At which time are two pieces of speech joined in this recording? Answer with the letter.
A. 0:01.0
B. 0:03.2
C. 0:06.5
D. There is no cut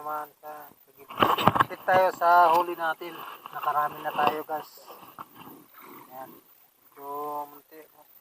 A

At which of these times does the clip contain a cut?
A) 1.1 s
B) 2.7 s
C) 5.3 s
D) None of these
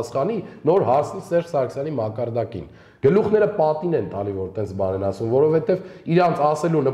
D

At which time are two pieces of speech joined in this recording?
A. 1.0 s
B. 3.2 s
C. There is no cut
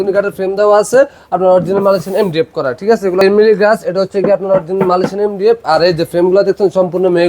B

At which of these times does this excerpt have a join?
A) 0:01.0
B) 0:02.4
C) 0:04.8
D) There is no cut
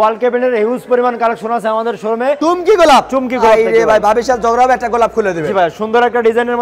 B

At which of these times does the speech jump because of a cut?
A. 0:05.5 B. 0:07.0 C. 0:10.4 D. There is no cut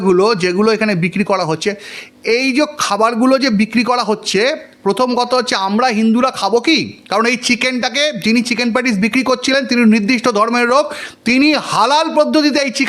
D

